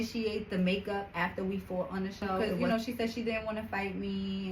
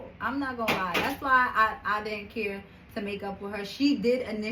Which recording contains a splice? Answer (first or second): first